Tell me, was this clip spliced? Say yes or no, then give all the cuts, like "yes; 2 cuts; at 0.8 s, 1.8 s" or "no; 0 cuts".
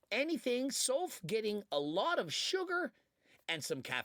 no; 0 cuts